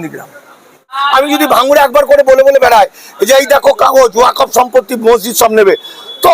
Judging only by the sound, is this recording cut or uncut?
cut